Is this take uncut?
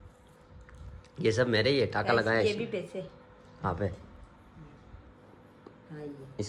yes; 0 cuts

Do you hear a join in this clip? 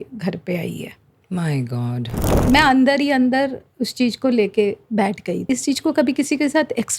yes; 2 cuts; at 2.2 s, 5.4 s

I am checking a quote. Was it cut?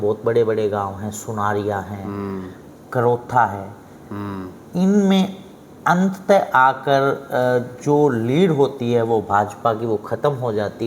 no; 0 cuts

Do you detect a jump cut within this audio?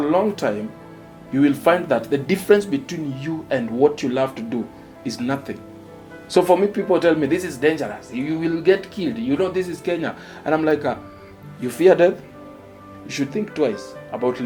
no; 0 cuts

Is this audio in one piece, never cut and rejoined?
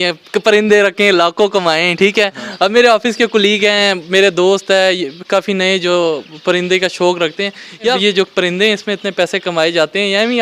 no; 1 cut; at 8.0 s

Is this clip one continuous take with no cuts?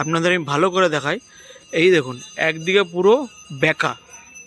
yes; 0 cuts

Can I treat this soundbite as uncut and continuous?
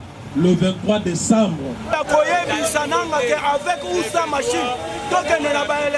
no; 1 cut; at 1.9 s

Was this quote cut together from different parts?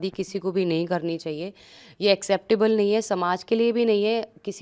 no; 0 cuts

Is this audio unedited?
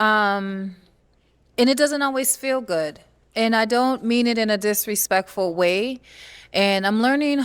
yes; 0 cuts

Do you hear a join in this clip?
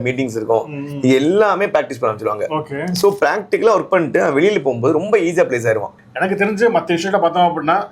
yes; 1 cut; at 6.0 s

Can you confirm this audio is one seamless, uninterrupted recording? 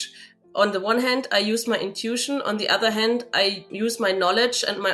no; 1 cut; at 3.6 s

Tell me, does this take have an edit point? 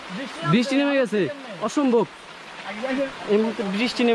yes; 1 cut; at 3.1 s

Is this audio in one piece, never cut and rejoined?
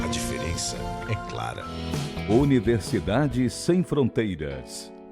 no; 1 cut; at 1.6 s

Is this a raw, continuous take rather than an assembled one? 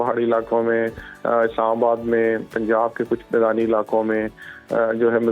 yes; 0 cuts

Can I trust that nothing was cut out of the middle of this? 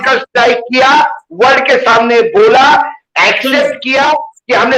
yes; 0 cuts

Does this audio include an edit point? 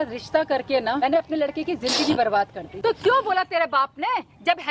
yes; 2 cuts; at 1.0 s, 2.6 s

